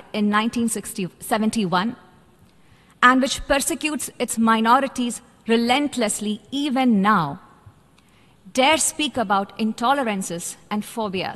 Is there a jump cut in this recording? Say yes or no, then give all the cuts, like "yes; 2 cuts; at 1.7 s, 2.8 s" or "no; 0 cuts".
no; 0 cuts